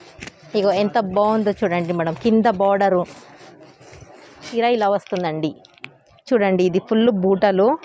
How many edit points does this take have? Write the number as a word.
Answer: one